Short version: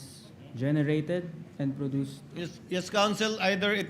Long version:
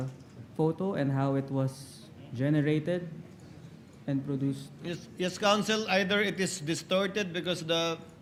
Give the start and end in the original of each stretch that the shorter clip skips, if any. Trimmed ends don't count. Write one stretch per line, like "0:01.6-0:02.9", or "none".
0:03.2-0:03.9